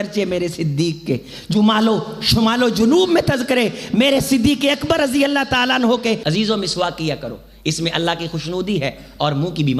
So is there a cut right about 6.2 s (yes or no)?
yes